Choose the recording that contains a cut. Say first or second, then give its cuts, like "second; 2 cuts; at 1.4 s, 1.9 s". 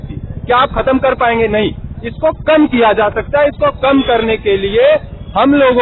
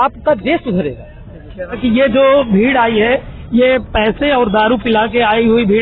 second; 1 cut; at 1.7 s